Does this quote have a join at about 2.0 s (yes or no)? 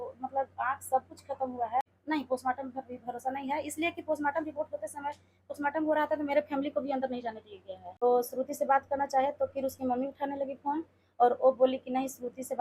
yes